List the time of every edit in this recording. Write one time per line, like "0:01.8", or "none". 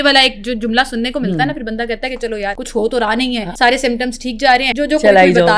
0:02.6
0:03.5
0:04.7